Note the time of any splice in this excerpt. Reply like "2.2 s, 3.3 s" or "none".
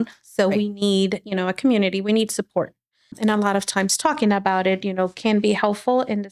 3.1 s